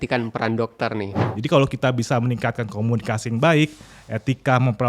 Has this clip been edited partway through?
yes; 1 cut; at 1.3 s

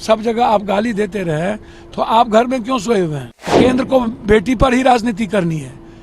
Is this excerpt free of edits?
no; 1 cut; at 3.6 s

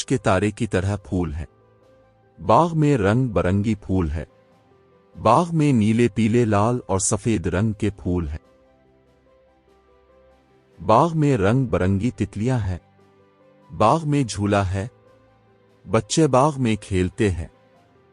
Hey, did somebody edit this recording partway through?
no; 0 cuts

